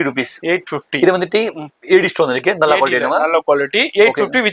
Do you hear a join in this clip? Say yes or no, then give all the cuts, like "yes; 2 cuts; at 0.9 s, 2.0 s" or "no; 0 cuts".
no; 0 cuts